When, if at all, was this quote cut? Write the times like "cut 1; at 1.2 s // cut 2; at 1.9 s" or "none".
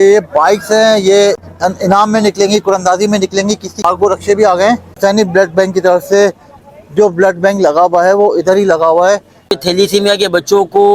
cut 1; at 1.5 s // cut 2; at 3.8 s // cut 3; at 4.9 s // cut 4; at 9.6 s